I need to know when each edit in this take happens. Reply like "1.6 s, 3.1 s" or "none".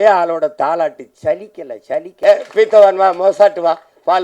2.1 s